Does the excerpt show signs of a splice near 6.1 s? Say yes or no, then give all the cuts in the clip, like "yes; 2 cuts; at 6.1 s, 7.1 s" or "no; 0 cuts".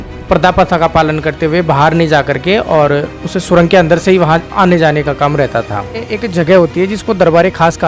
yes; 1 cut; at 6.1 s